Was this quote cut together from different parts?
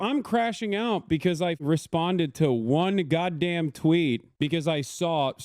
yes; 1 cut; at 4.3 s

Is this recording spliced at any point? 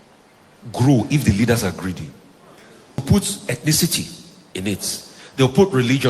yes; 1 cut; at 3.0 s

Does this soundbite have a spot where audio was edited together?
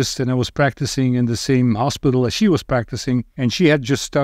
yes; 1 cut; at 3.3 s

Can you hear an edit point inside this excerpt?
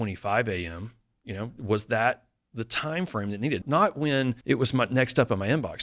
yes; 2 cuts; at 3.6 s, 4.4 s

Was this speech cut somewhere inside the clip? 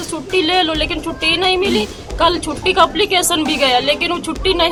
no; 0 cuts

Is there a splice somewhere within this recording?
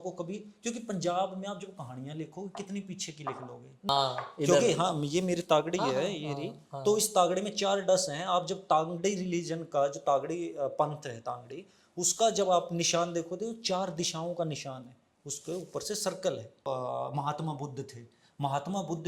yes; 2 cuts; at 3.9 s, 16.7 s

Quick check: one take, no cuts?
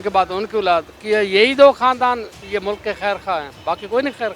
no; 1 cut; at 2.3 s

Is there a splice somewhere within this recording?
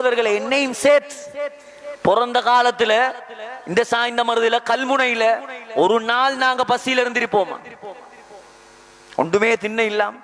no; 0 cuts

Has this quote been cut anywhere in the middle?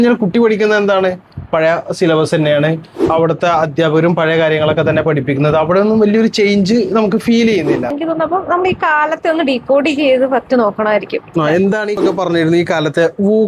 yes; 2 cuts; at 8.0 s, 12.0 s

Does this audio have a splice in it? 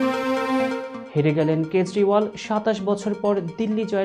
no; 0 cuts

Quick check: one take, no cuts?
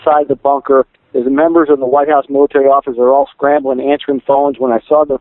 yes; 0 cuts

